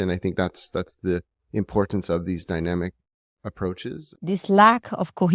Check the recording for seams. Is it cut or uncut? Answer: cut